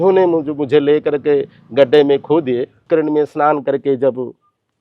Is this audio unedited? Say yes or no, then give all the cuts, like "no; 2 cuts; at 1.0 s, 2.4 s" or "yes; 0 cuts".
no; 1 cut; at 2.8 s